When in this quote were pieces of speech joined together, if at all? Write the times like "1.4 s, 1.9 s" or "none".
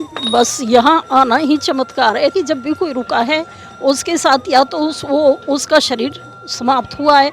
2.3 s